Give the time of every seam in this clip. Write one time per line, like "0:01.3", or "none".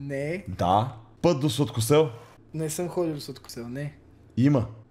0:01.0